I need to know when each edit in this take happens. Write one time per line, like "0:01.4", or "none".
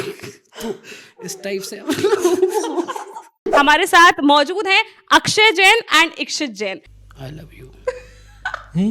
0:03.4
0:06.9